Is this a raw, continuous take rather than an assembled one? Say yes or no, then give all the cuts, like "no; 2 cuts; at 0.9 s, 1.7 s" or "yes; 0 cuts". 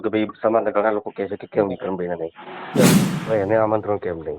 no; 1 cut; at 2.9 s